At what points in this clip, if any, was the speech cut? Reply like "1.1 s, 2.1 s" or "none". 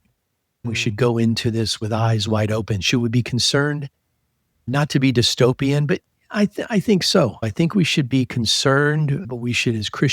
7.4 s

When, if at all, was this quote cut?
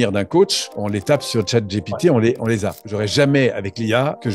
2.8 s

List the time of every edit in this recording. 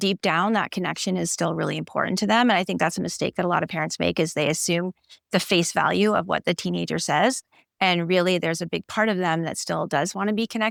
none

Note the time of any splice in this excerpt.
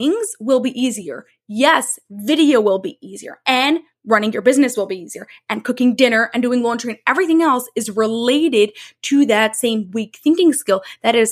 none

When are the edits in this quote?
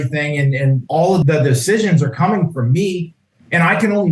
1.0 s

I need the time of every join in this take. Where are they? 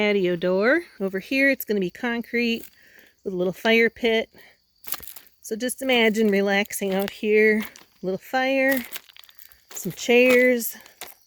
0.9 s

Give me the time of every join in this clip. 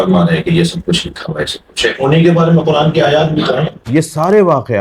3.8 s

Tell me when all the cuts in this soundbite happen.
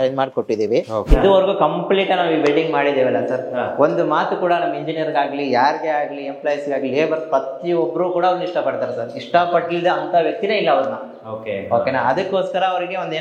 1.1 s

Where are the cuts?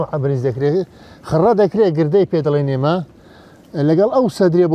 none

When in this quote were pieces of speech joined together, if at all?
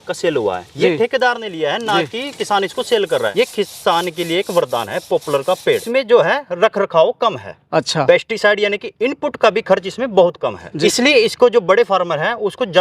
3.3 s, 5.7 s, 10.7 s

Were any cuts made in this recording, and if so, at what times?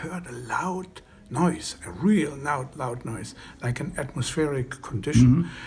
none

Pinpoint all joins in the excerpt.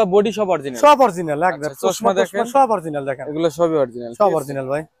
none

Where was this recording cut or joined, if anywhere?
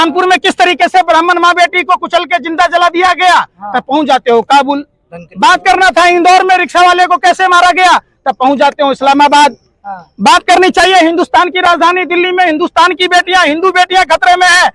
none

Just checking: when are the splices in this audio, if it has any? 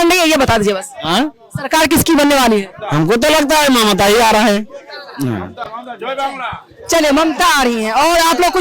none

